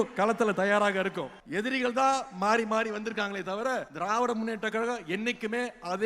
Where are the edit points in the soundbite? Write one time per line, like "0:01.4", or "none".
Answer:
0:01.3
0:03.9